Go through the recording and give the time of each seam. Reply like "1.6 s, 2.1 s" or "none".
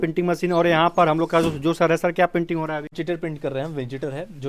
3.0 s